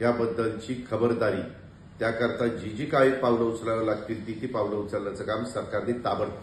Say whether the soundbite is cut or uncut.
uncut